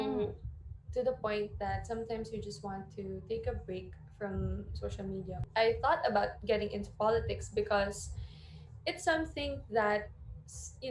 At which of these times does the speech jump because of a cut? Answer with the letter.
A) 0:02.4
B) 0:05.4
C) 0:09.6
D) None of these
B